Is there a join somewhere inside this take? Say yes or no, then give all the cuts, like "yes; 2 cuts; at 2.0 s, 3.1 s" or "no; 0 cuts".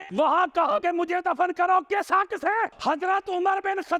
no; 0 cuts